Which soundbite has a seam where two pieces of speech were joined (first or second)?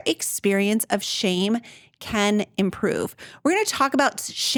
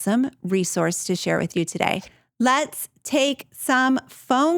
second